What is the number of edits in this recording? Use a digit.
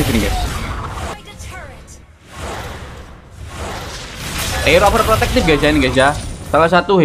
1